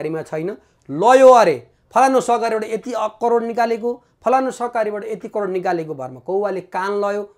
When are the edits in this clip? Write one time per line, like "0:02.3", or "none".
none

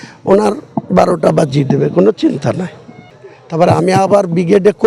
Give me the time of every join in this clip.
0:03.0

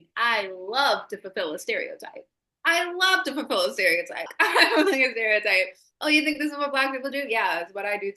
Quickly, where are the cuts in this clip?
0:04.3

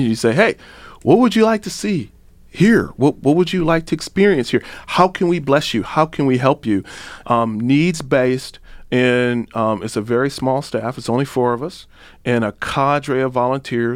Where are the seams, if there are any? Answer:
0:07.1

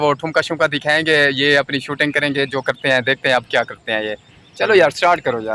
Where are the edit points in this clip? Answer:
none

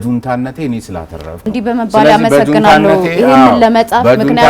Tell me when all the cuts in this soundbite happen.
0:01.5

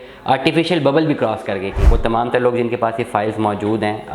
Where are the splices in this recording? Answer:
0:01.9

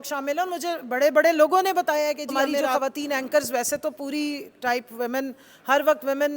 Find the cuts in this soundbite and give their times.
0:02.7

